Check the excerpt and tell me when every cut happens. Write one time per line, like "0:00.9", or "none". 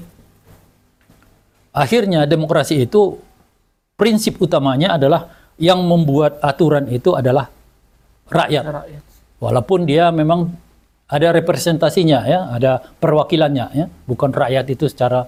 none